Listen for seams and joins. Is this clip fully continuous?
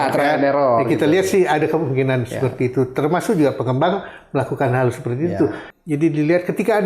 no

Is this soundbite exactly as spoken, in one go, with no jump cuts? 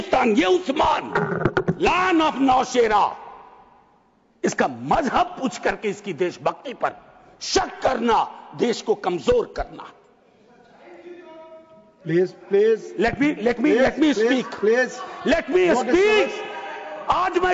yes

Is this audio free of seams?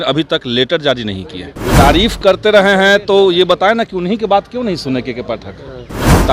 no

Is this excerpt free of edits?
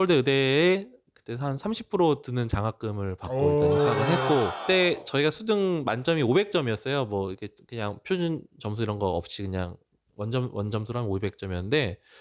yes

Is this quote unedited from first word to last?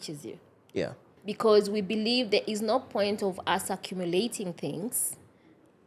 no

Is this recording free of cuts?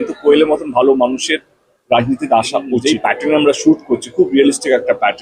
no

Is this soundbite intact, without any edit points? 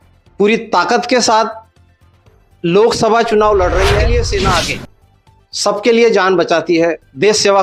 no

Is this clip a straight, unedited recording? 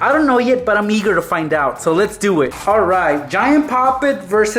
no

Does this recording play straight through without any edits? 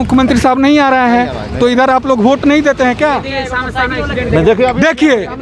yes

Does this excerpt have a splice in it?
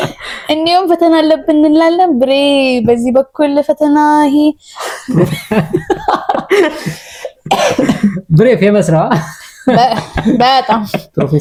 no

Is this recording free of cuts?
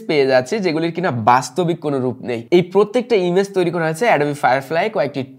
no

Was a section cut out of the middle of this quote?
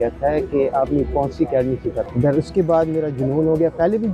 yes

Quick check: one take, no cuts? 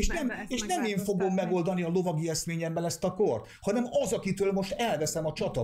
yes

